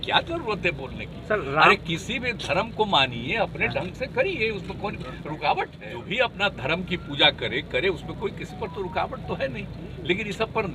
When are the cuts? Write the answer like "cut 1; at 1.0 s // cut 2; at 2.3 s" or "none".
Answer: cut 1; at 6.1 s